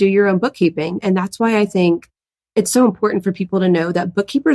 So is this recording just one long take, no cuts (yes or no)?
yes